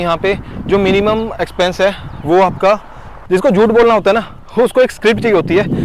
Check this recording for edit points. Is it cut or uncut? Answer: cut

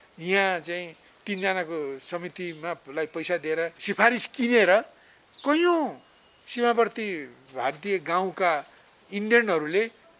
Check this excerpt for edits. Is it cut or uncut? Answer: cut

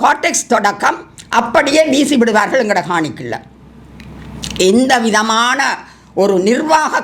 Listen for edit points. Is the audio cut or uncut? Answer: uncut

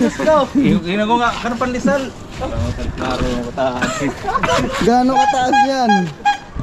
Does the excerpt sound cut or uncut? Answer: uncut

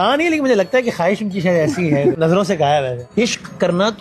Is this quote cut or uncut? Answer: cut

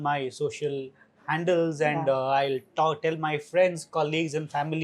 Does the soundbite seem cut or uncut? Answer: uncut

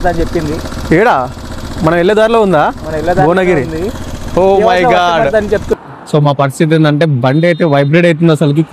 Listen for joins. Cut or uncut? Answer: cut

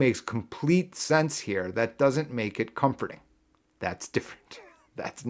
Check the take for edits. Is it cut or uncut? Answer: uncut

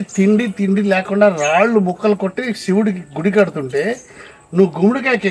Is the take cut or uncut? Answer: uncut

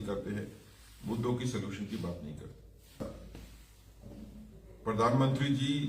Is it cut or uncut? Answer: cut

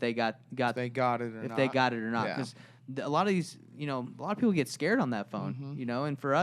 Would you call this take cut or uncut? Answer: uncut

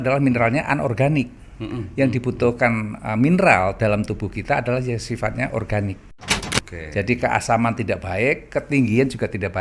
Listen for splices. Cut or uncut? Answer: cut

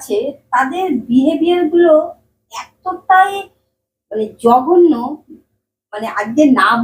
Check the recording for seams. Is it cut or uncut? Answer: uncut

